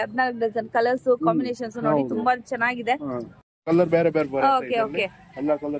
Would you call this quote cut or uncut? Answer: cut